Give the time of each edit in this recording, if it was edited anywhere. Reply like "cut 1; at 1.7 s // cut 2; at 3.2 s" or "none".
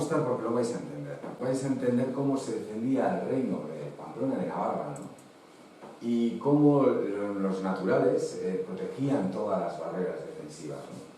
cut 1; at 1.4 s